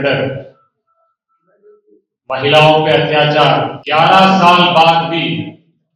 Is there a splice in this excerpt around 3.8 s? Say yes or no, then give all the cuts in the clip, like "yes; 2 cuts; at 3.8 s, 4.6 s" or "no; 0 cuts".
yes; 1 cut; at 3.8 s